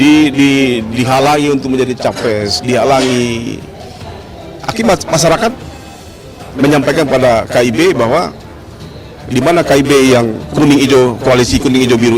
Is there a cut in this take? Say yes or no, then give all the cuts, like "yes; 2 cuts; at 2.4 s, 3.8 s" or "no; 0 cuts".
yes; 1 cut; at 10.9 s